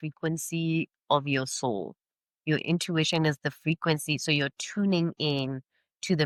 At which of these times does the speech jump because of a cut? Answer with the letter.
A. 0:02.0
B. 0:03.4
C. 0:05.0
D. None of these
D